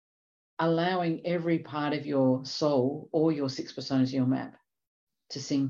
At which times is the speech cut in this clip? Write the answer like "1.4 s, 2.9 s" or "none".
none